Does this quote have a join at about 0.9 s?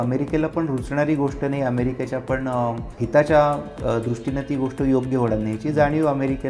no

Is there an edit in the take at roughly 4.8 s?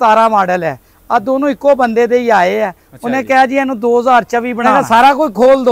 yes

